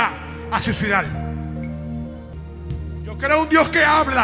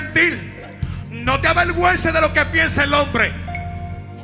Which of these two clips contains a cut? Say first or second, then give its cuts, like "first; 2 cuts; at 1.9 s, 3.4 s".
first; 1 cut; at 2.4 s